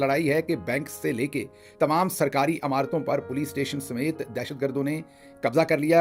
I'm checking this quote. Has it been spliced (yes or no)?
no